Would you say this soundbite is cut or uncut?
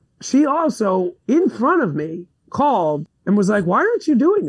uncut